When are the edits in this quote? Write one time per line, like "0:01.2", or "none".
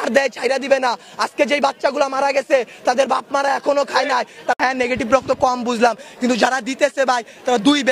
0:04.6